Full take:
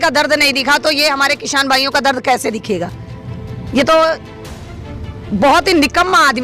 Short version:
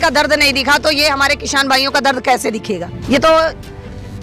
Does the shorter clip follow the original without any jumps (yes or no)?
no